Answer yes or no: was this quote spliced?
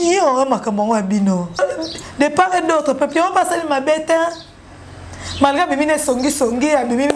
yes